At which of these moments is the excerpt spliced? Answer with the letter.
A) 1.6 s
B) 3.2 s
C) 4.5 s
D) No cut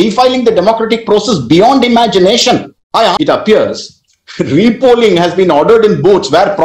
B